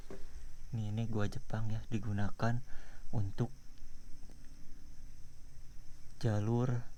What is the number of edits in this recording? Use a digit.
0